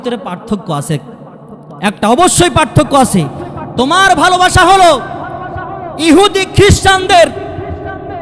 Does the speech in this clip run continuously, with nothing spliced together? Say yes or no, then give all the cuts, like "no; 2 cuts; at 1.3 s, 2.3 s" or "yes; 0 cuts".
yes; 0 cuts